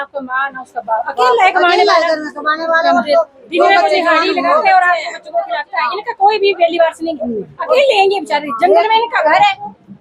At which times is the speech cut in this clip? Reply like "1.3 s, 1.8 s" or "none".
none

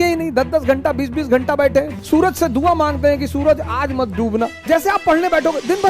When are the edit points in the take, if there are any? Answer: 1.9 s, 4.7 s

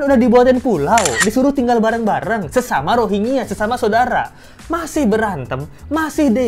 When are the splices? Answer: none

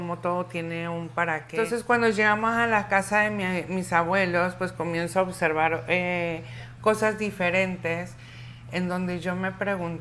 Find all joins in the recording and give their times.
1.5 s

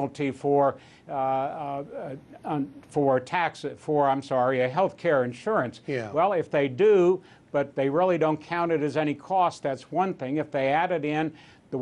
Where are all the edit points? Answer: none

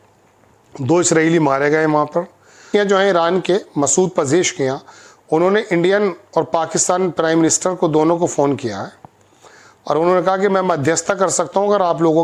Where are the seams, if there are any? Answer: 2.6 s

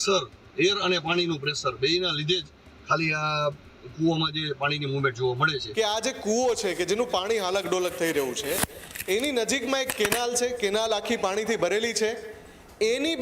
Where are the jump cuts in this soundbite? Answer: 5.6 s

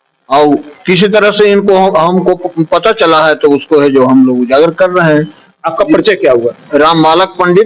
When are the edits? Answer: none

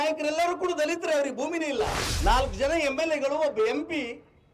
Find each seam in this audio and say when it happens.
2.0 s

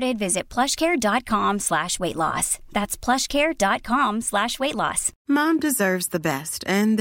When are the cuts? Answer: 5.1 s

